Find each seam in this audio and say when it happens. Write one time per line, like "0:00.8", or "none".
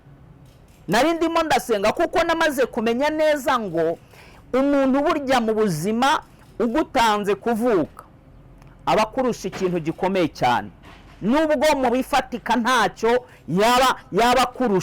none